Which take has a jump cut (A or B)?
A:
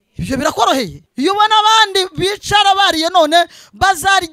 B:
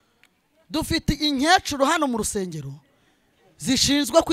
A